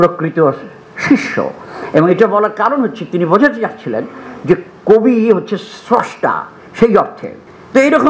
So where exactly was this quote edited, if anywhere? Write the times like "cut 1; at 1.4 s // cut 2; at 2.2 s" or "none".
none